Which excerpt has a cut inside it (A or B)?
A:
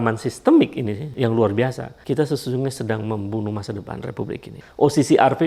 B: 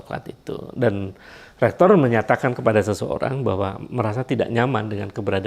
A